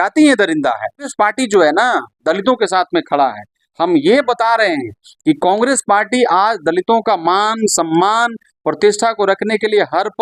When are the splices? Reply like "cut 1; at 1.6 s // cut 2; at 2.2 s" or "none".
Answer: cut 1; at 1.1 s